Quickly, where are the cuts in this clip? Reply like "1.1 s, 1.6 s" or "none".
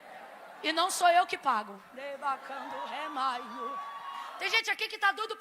4.3 s

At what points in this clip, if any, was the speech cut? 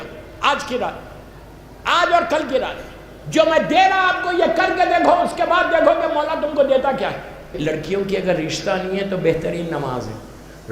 7.6 s

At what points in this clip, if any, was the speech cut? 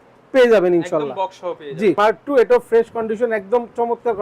2.0 s

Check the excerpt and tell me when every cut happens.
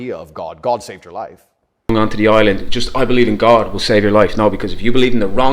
1.9 s

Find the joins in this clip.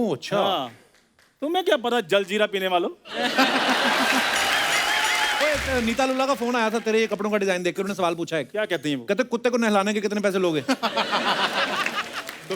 5.4 s

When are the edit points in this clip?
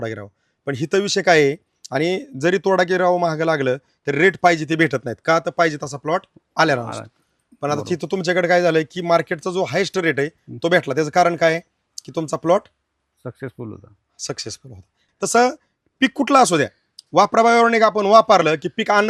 15.0 s

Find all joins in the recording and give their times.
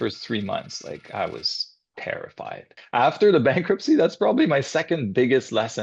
1.0 s, 2.8 s

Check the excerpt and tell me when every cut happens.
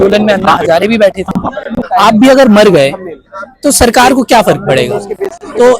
1.8 s

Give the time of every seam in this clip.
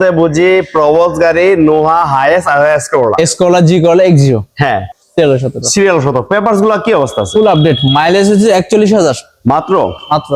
5.0 s

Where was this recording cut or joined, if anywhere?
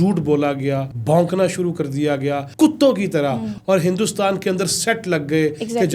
0.9 s, 2.5 s, 3.5 s

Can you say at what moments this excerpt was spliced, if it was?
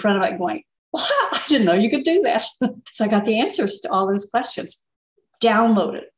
2.8 s

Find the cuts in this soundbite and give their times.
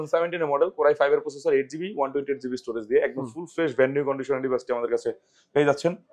none

